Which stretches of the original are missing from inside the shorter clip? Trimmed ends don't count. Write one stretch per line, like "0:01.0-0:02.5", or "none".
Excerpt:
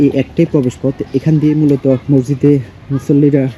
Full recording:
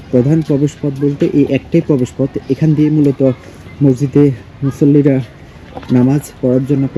0:03.4-0:03.7

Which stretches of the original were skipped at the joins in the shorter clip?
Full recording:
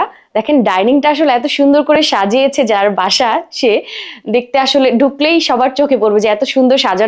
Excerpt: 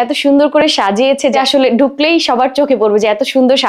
0:02.7-0:04.5

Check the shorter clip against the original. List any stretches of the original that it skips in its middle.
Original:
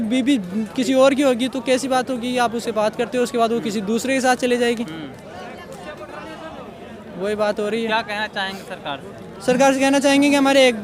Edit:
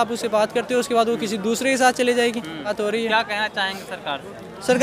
0:05.1-0:07.5

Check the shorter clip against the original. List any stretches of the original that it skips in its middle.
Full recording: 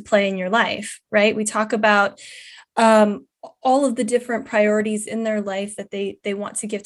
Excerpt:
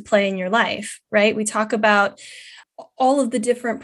0:02.6-0:03.3

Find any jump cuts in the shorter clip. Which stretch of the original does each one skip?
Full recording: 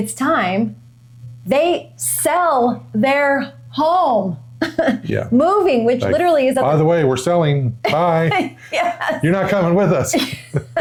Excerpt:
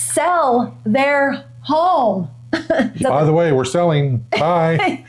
0:05.1-0:06.5

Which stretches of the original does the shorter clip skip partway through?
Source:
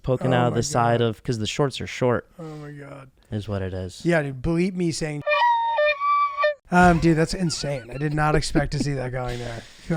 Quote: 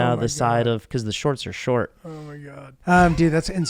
0:03.1-0:06.6

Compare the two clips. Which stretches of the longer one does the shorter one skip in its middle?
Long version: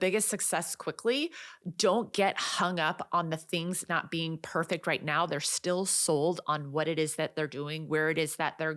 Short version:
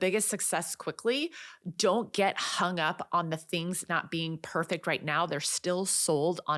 none

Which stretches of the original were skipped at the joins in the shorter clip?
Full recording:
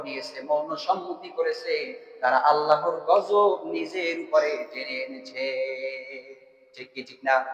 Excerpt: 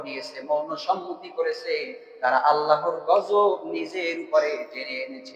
none

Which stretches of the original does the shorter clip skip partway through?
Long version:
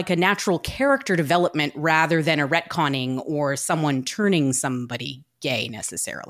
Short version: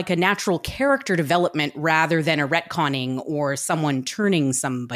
none

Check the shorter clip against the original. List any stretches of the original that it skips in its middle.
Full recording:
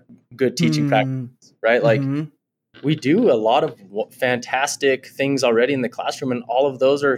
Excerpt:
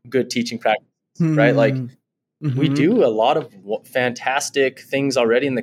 none

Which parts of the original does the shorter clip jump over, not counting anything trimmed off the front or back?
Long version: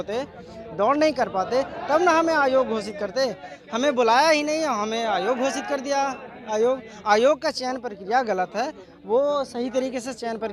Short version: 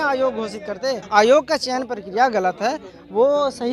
0:03.4-0:07.0

